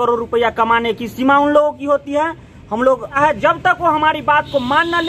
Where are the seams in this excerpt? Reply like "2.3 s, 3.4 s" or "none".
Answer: 3.2 s